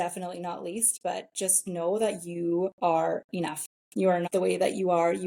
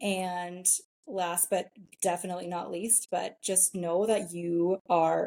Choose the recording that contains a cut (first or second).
first